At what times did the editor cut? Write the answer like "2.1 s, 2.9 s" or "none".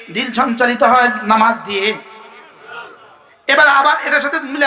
none